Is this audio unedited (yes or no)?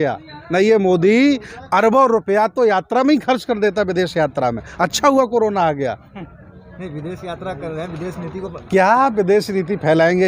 yes